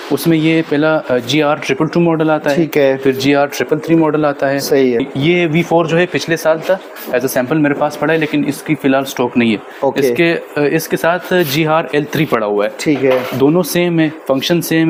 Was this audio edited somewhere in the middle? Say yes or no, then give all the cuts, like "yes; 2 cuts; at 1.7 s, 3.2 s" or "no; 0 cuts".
no; 0 cuts